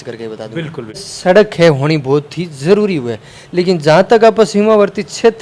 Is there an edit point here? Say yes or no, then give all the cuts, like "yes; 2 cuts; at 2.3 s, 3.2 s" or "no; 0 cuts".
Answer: yes; 1 cut; at 1.1 s